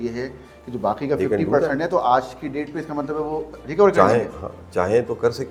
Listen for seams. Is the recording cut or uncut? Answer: uncut